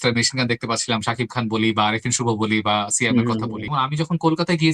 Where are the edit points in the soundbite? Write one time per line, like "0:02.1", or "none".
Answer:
0:03.7